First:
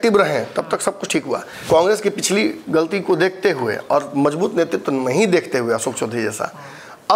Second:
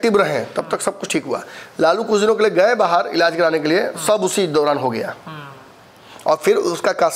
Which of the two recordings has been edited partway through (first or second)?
first